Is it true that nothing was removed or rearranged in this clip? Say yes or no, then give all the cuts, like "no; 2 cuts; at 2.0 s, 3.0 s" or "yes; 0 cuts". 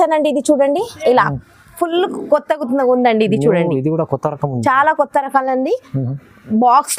yes; 0 cuts